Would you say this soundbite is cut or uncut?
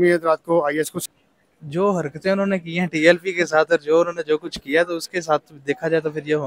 cut